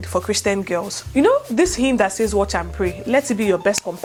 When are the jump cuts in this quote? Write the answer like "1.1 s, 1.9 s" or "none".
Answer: none